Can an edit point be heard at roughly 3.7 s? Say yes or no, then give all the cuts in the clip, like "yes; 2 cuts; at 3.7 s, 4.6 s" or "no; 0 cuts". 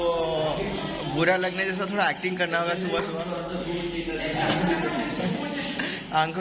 no; 0 cuts